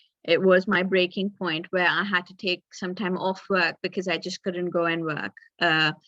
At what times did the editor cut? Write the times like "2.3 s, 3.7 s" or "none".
none